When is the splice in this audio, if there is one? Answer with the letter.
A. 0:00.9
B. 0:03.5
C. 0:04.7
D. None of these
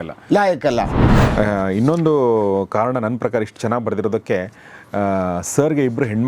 A